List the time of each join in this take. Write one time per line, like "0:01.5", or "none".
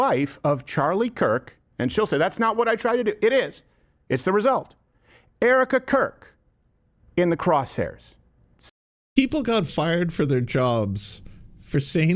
0:08.6